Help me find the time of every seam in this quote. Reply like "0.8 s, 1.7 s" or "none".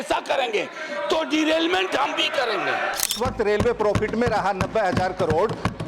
3.1 s